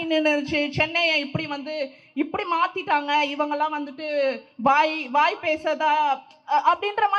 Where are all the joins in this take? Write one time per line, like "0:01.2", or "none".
none